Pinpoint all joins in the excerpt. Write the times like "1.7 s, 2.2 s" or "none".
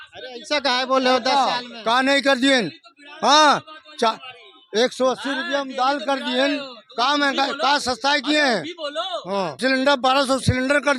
9.6 s

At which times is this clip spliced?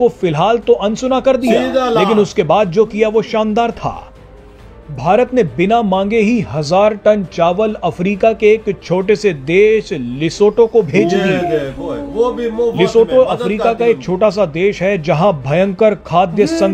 none

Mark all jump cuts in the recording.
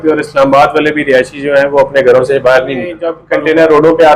3.1 s

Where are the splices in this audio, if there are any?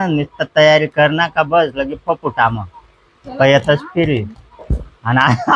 none

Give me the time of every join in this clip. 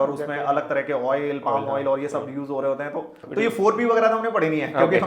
3.2 s

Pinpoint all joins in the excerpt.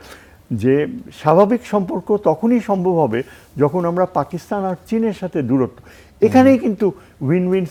none

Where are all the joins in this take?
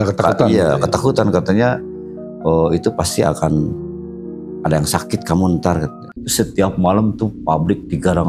6.0 s

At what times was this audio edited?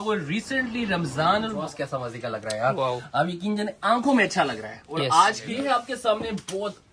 1.5 s, 5.4 s

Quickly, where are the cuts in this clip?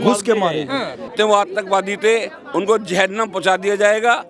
1.0 s

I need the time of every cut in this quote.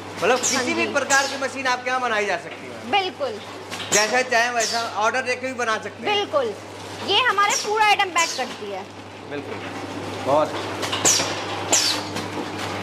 none

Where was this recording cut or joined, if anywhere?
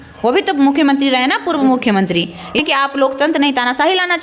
2.6 s

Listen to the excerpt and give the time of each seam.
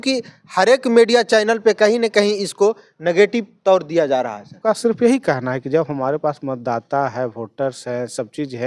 4.6 s

